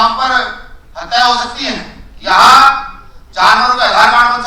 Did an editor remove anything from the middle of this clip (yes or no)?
no